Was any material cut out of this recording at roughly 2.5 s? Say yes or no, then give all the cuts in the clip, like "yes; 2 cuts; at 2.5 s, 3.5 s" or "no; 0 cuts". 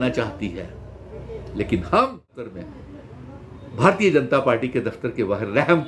yes; 1 cut; at 2.5 s